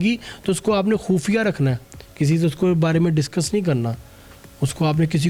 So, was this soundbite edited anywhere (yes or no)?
no